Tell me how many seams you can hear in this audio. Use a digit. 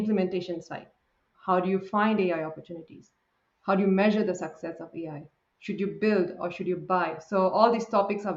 1